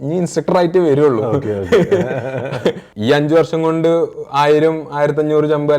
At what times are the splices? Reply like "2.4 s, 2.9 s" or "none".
2.9 s